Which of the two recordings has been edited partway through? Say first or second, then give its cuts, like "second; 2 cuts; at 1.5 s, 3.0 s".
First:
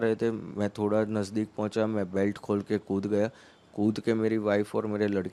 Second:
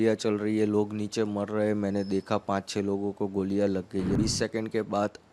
second; 1 cut; at 4.2 s